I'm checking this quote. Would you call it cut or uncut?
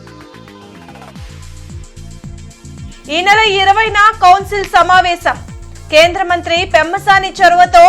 uncut